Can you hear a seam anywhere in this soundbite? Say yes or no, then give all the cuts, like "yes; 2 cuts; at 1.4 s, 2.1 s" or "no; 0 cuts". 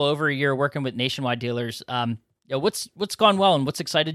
no; 0 cuts